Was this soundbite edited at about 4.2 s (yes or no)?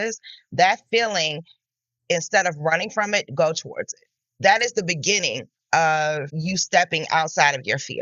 yes